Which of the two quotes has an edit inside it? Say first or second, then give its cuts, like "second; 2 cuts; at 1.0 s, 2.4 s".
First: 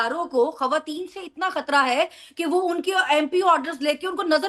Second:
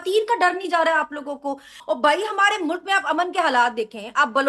second; 1 cut; at 1.7 s